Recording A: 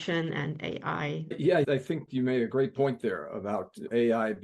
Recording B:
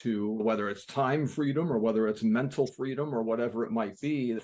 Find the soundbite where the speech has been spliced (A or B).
A